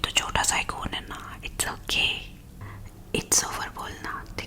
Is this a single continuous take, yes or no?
no